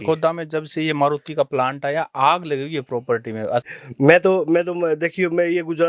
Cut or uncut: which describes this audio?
cut